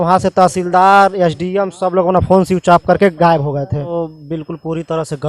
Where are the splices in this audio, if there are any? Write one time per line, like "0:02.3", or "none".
0:03.9